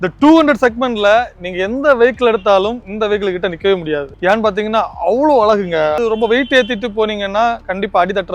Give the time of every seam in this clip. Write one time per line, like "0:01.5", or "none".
0:04.1
0:06.0